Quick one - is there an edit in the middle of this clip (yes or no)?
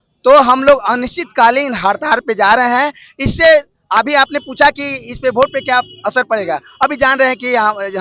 no